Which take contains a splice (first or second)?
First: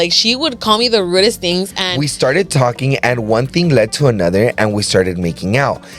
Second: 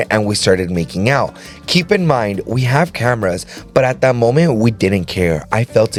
first